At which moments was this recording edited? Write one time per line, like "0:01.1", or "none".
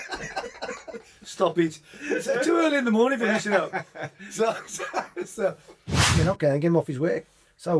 0:05.9